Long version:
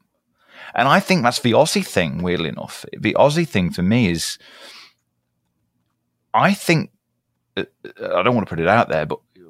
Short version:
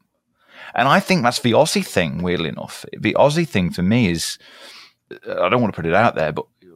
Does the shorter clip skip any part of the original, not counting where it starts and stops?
yes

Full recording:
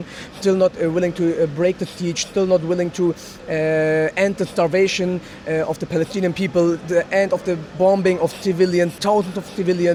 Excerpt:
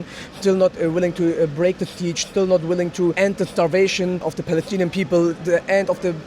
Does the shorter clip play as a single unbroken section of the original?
no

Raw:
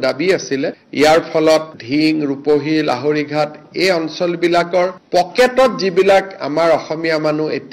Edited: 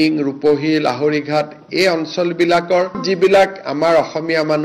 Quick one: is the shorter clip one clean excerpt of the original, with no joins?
no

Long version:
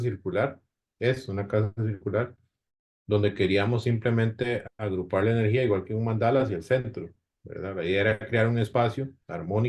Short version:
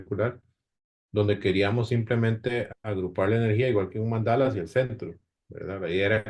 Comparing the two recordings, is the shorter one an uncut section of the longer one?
yes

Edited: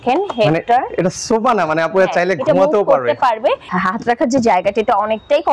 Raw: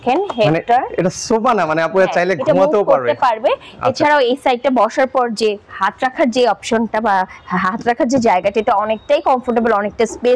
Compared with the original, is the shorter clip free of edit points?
no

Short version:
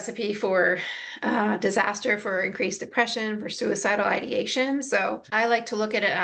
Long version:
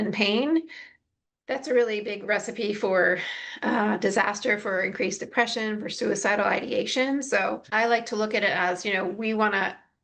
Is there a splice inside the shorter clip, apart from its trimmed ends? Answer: no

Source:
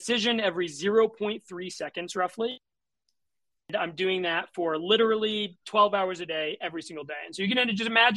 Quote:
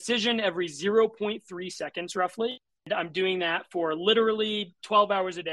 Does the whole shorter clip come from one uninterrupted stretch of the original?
no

